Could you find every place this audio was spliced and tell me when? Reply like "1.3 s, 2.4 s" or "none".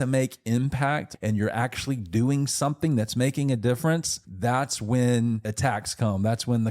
1.1 s, 4.2 s, 5.5 s